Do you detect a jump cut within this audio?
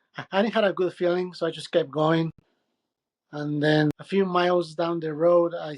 yes; 1 cut; at 3.9 s

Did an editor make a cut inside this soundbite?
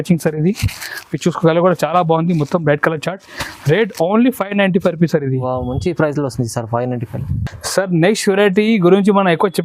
no; 0 cuts

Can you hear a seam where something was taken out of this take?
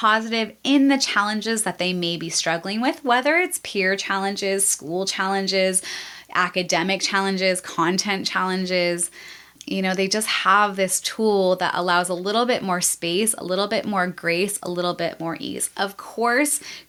no; 0 cuts

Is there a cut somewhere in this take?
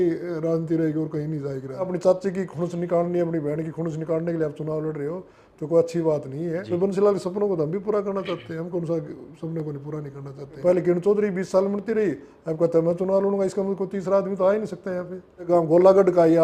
yes; 4 cuts; at 1.9 s, 6.6 s, 10.6 s, 15.5 s

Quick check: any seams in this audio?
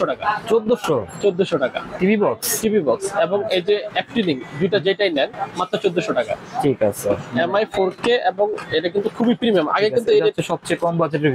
no; 0 cuts

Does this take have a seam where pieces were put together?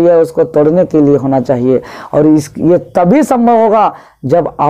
no; 0 cuts

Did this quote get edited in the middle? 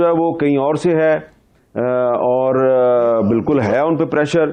no; 0 cuts

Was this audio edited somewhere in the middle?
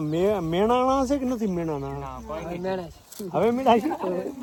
no; 0 cuts

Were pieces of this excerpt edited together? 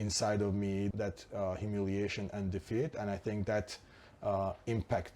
yes; 1 cut; at 0.9 s

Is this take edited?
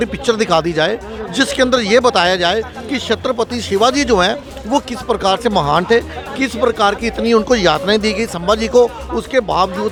no; 0 cuts

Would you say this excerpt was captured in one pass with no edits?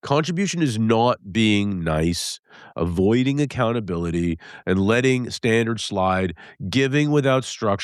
yes; 0 cuts

